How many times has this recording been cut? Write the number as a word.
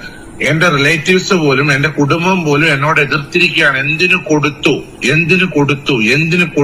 zero